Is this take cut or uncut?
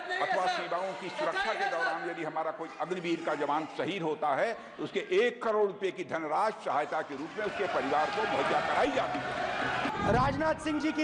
cut